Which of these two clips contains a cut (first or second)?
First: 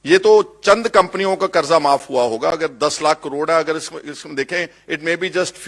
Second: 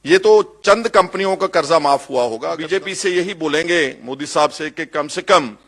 second